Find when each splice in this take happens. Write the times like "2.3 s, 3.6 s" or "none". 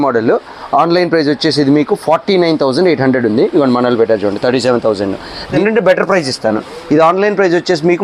5.6 s